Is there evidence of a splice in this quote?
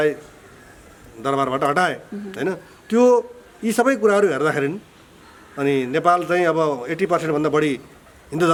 no; 0 cuts

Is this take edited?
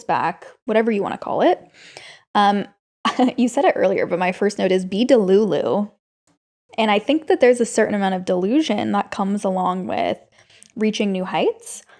no; 0 cuts

